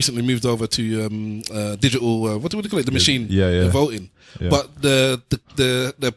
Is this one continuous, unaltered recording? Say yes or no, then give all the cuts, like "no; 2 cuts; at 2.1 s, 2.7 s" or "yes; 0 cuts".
yes; 0 cuts